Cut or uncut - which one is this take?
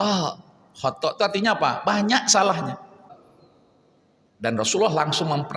cut